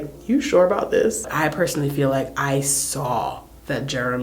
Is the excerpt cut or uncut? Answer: uncut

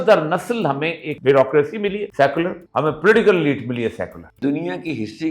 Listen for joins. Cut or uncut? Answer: cut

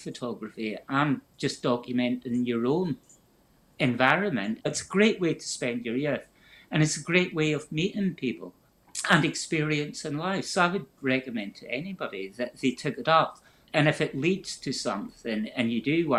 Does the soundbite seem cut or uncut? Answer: cut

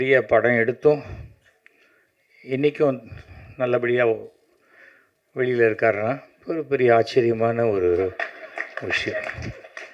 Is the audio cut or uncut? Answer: uncut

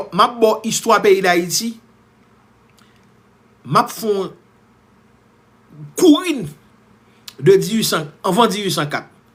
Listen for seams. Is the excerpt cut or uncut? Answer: uncut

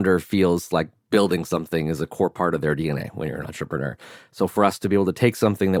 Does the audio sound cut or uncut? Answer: uncut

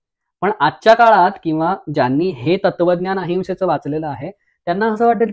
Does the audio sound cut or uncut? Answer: uncut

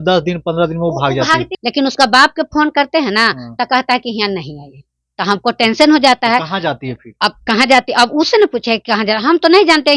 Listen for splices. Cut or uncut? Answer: cut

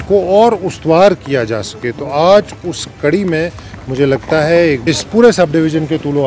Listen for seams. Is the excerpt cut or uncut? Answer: cut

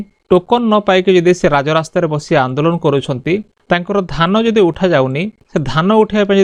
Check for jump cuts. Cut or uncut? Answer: uncut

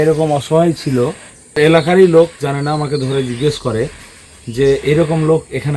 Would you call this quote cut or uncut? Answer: cut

